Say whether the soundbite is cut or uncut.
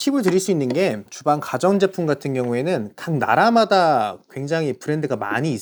uncut